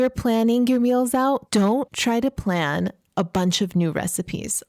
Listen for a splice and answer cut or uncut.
cut